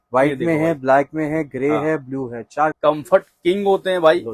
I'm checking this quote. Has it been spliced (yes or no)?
yes